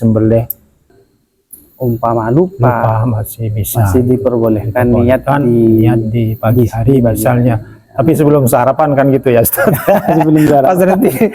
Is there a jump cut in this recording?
yes; 1 cut; at 0.9 s

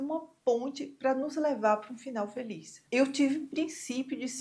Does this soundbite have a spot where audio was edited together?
yes; 1 cut; at 2.8 s

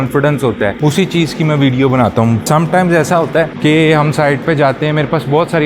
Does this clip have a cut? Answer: no; 0 cuts

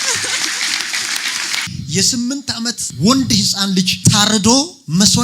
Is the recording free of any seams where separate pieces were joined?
no; 1 cut; at 1.6 s

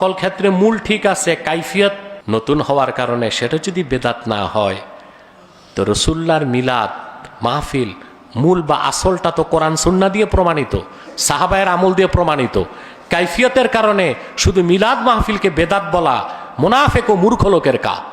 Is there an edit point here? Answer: yes; 1 cut; at 2.1 s

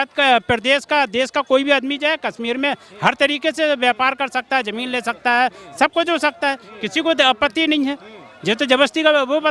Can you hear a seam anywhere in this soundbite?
no; 0 cuts

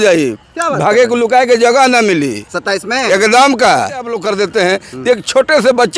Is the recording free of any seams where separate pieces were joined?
no; 1 cut; at 4.2 s

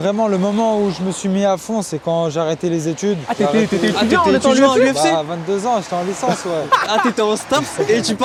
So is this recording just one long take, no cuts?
yes; 0 cuts

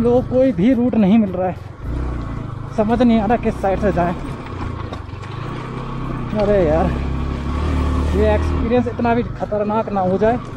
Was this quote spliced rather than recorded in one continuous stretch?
no; 0 cuts

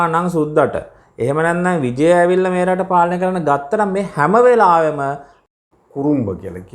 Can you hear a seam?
yes; 1 cut; at 5.5 s

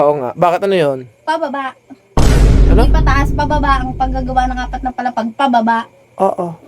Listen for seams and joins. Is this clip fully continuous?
yes; 0 cuts

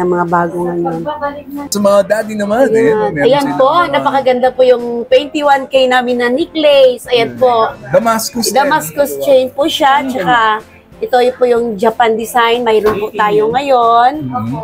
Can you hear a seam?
yes; 1 cut; at 1.7 s

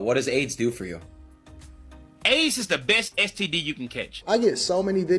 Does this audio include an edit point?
yes; 1 cut; at 4.2 s

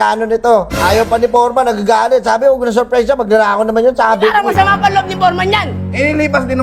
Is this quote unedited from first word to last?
yes; 0 cuts

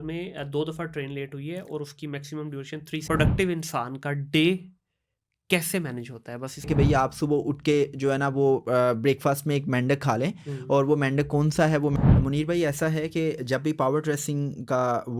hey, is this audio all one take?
no; 3 cuts; at 3.0 s, 6.7 s, 11.9 s

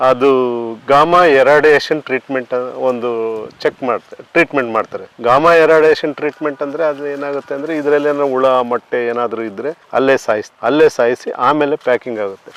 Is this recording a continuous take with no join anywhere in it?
yes; 0 cuts

